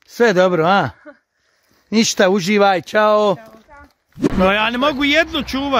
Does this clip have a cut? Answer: yes; 1 cut; at 4.3 s

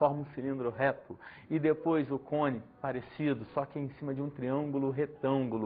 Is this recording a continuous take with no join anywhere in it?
no; 1 cut; at 1.0 s

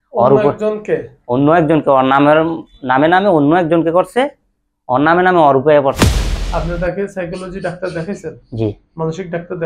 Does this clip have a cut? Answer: yes; 1 cut; at 6.2 s

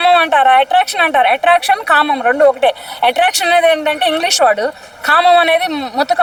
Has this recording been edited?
no; 0 cuts

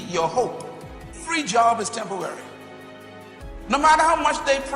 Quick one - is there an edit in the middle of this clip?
yes; 1 cut; at 1.3 s

